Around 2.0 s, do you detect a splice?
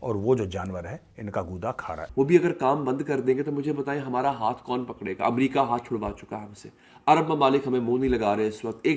yes; 1 cut; at 2.0 s

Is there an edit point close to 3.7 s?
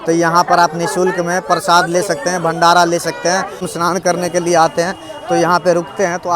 yes; 1 cut; at 3.7 s

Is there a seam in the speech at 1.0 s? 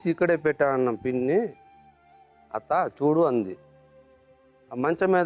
no; 0 cuts

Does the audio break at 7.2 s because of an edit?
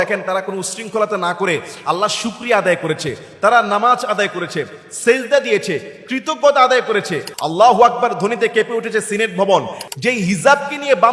yes; 2 cuts; at 7.2 s, 9.8 s

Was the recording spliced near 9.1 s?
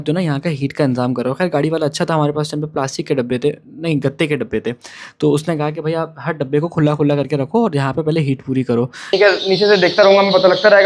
yes; 1 cut; at 9.1 s

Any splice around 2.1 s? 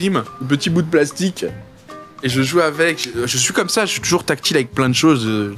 yes; 1 cut; at 2.1 s

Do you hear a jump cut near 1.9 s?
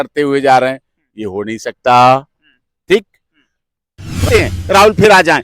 no; 1 cut; at 4.2 s

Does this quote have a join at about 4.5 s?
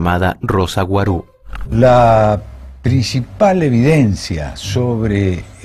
no; 1 cut; at 3.3 s

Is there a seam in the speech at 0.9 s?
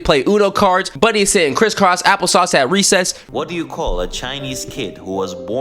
no; 1 cut; at 3.2 s

